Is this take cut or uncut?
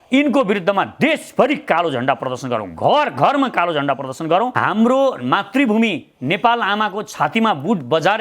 cut